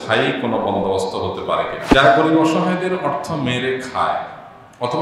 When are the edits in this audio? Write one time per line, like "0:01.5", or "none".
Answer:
0:01.8